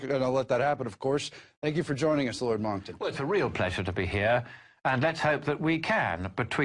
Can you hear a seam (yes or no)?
yes